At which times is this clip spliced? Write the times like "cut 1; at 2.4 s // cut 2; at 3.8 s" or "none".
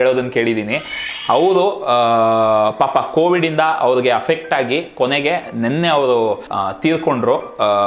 cut 1; at 0.9 s // cut 2; at 6.5 s